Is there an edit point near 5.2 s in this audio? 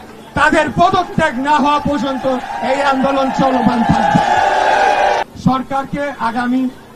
yes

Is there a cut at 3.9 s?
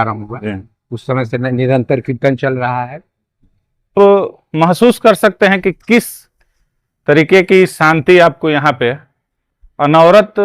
yes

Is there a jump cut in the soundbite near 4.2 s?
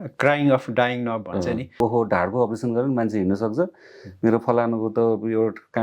no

